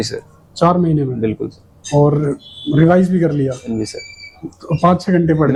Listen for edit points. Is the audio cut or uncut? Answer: uncut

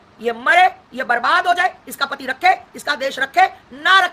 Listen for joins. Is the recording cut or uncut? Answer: uncut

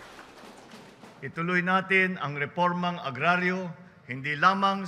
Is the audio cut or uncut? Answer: cut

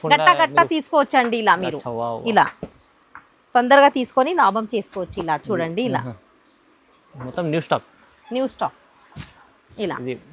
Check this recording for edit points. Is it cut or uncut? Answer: uncut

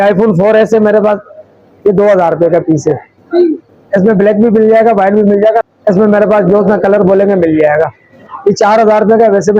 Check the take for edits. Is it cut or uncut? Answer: cut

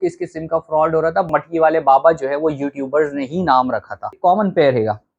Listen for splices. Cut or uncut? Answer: cut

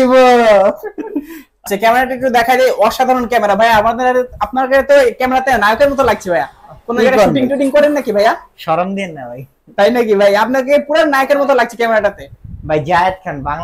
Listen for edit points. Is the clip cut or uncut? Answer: cut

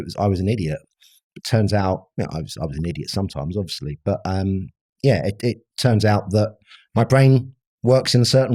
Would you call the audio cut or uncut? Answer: uncut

